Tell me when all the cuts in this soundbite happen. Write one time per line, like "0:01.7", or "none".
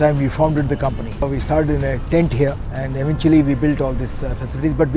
0:01.3
0:02.7